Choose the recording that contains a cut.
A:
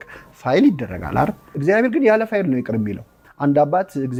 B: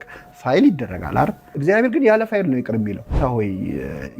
B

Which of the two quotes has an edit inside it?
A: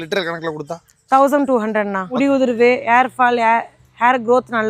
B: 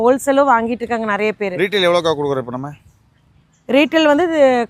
A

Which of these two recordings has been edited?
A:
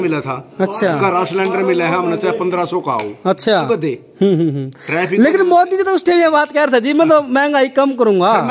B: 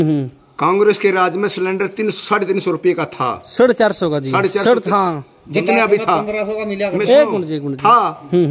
A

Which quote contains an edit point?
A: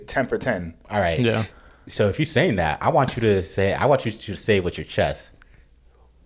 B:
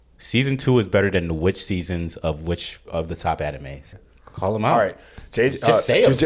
B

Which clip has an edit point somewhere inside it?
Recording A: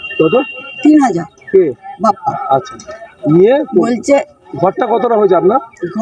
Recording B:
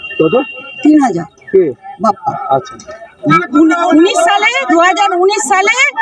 B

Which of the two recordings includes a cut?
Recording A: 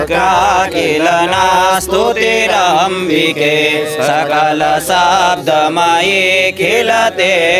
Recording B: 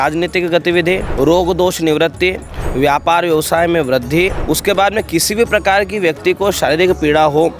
B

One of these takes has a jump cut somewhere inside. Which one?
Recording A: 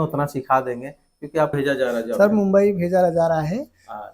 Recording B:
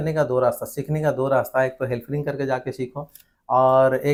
A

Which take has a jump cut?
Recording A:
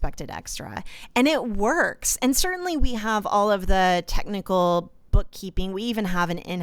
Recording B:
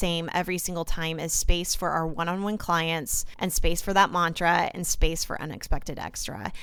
B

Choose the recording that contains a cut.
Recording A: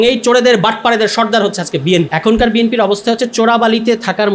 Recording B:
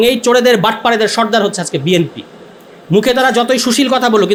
A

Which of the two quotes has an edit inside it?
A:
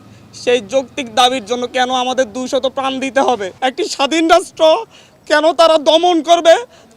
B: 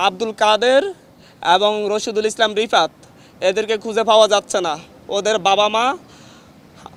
A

